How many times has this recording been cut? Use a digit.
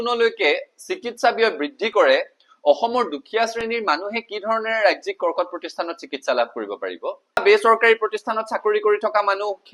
1